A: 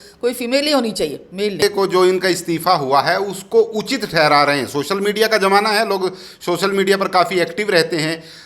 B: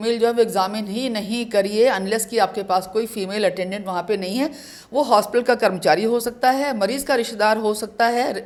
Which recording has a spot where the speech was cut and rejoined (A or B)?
A